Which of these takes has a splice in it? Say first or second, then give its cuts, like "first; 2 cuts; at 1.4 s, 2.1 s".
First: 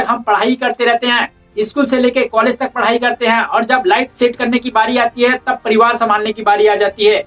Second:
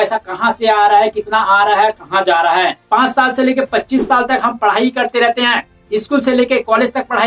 second; 1 cut; at 2.8 s